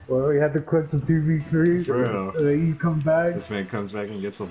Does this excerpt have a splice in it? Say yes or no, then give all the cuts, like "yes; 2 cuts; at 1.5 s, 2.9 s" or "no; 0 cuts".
no; 0 cuts